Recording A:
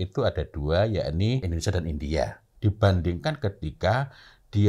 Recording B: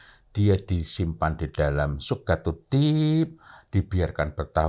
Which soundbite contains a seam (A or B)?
A